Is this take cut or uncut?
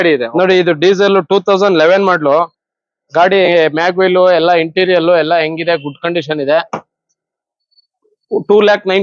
uncut